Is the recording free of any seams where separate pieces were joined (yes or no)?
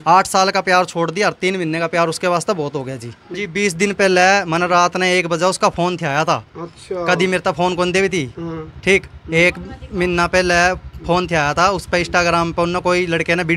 no